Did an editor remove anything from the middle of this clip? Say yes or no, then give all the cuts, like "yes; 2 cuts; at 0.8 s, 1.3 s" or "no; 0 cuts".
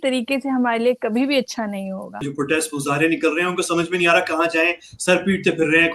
yes; 1 cut; at 2.3 s